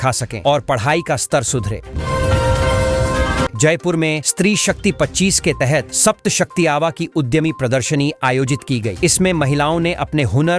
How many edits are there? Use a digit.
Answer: 2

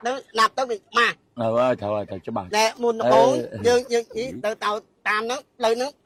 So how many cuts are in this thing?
0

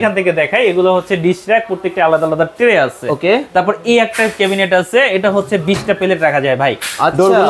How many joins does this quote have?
0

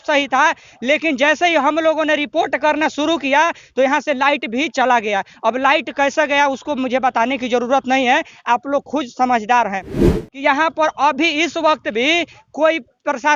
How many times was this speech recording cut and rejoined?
1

